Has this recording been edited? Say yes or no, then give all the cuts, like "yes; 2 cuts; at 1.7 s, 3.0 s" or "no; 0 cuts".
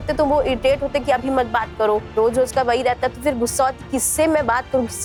no; 0 cuts